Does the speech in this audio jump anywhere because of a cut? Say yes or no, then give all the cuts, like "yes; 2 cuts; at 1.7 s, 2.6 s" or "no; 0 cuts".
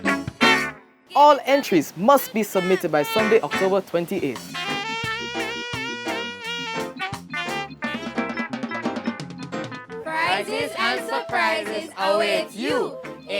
yes; 2 cuts; at 1.0 s, 10.0 s